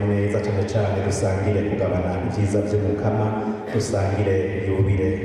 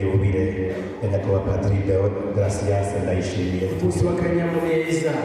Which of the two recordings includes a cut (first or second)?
second